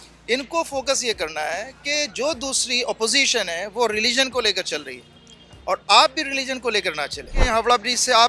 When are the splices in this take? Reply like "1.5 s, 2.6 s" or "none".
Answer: 7.4 s